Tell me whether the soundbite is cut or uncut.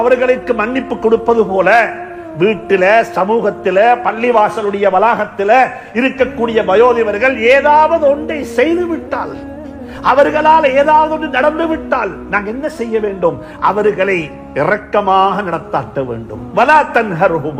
uncut